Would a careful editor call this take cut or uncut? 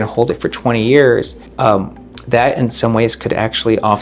cut